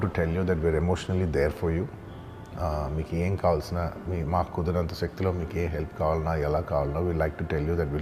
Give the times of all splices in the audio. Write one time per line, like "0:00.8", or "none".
none